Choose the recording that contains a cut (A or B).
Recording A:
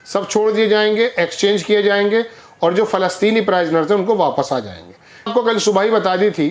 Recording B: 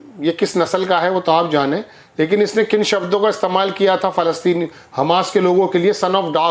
A